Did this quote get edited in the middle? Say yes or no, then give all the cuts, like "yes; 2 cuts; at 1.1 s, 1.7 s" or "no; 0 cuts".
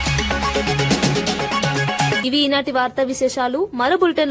no; 0 cuts